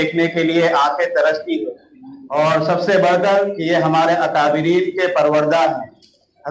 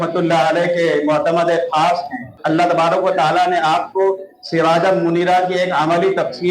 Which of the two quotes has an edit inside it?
second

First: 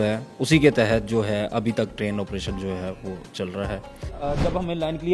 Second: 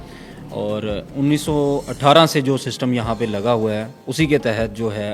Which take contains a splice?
first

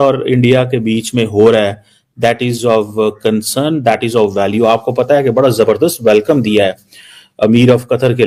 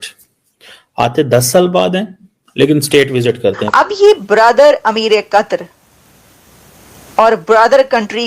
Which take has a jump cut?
second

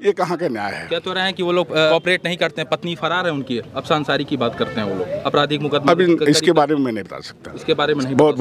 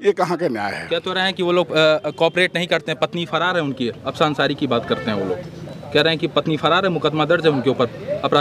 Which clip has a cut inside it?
first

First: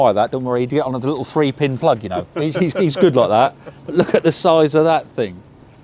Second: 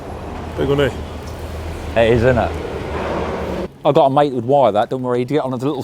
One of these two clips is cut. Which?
second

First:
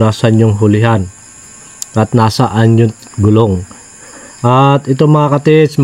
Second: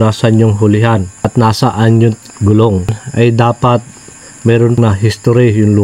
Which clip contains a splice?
second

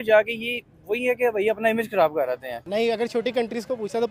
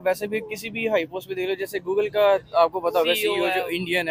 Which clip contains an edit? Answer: first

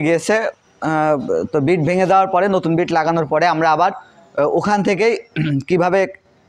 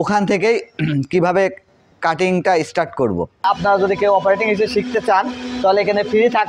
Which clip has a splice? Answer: second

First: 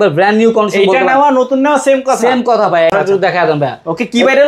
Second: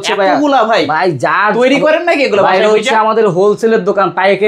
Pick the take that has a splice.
first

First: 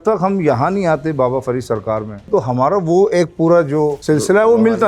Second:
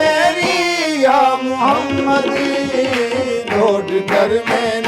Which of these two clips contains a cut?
first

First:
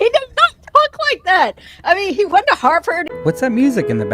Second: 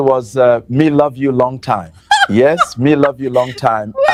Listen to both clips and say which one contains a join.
first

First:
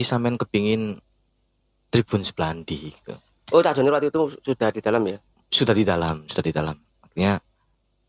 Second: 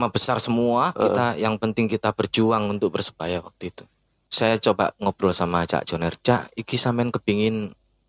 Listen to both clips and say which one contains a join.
second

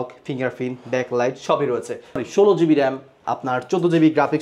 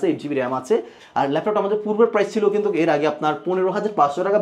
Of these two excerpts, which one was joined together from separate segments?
first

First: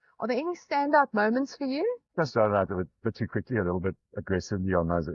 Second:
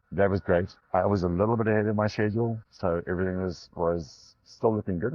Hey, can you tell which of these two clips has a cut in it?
first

